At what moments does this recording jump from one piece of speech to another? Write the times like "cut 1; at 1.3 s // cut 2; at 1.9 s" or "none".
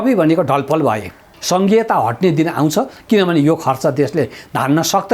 cut 1; at 1.3 s